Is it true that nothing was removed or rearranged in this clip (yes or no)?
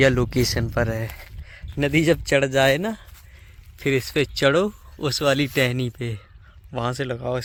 yes